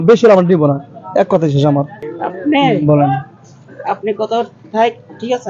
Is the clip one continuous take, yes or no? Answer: no